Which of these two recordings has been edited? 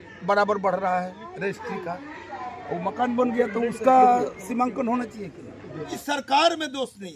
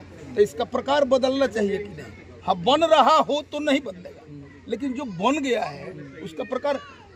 first; 1 cut; at 6.0 s

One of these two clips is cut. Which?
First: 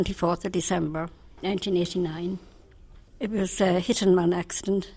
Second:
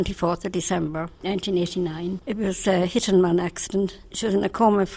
second; 3 cuts; at 1.1 s, 2.2 s, 4.0 s

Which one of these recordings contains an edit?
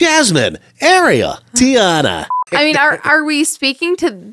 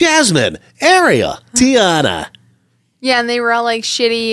first; 1 cut; at 2.4 s

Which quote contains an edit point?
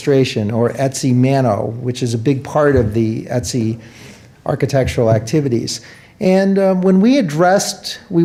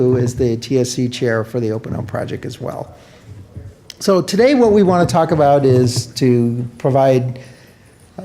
second; 1 cut; at 4.0 s

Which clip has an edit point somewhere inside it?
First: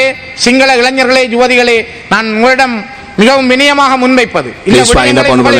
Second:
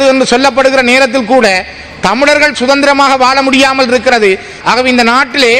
second; 1 cut; at 4.5 s

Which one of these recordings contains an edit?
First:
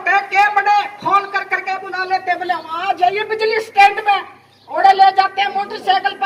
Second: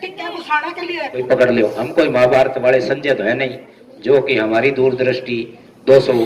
second; 1 cut; at 1.2 s

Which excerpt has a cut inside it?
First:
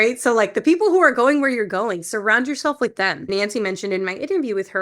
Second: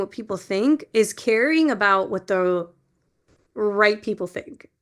first; 1 cut; at 3.3 s

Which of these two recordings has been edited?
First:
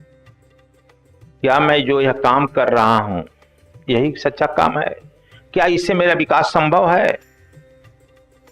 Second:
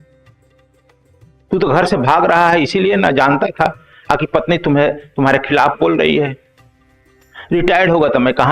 second; 1 cut; at 1.4 s

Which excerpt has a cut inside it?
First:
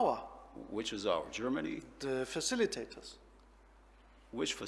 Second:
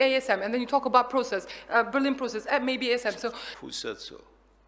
second; 1 cut; at 3.5 s

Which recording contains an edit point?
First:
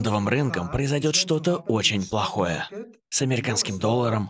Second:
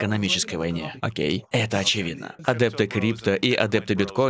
second; 1 cut; at 2.3 s

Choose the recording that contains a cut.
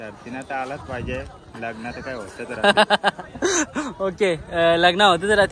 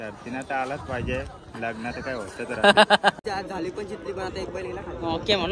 second; 1 cut; at 3.2 s

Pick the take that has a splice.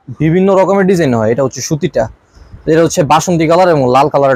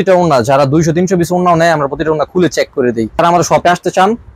second; 1 cut; at 3.2 s

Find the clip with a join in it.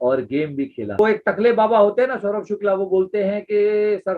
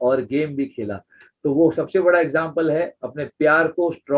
first; 1 cut; at 1.0 s

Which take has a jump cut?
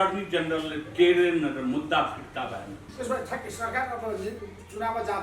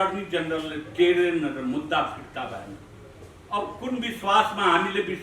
first; 1 cut; at 2.9 s

